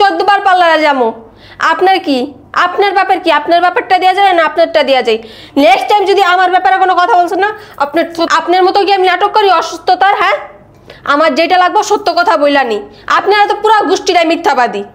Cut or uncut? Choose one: uncut